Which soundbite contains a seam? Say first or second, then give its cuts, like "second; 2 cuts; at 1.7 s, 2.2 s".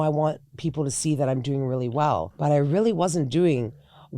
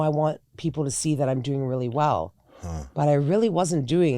first; 1 cut; at 2.3 s